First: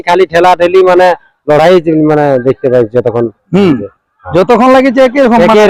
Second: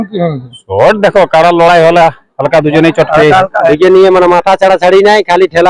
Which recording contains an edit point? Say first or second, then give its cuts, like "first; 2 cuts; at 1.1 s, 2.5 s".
second; 1 cut; at 3.7 s